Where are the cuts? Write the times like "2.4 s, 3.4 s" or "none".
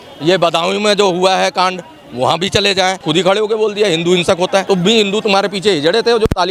3.0 s, 4.6 s